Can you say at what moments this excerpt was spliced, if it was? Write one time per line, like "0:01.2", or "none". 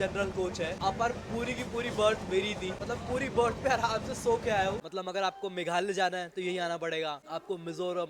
0:02.8
0:04.8
0:07.2